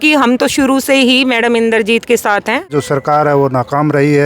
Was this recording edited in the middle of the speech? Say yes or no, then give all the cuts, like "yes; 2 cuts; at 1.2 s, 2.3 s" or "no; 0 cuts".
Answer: yes; 1 cut; at 2.6 s